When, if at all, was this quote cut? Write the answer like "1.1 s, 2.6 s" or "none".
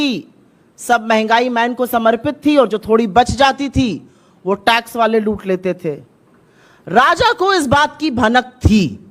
none